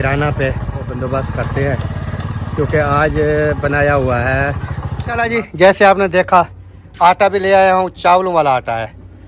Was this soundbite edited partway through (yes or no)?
yes